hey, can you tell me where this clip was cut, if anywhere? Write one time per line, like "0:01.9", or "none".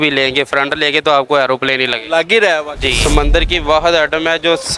0:03.0